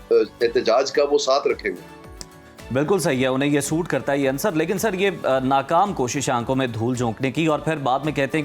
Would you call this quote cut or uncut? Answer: uncut